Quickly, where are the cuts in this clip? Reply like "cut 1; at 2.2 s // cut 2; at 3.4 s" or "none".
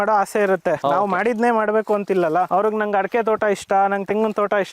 cut 1; at 0.8 s // cut 2; at 2.5 s